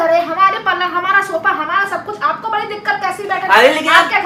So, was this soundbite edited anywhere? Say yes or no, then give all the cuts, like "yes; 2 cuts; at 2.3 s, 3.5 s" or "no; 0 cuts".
no; 0 cuts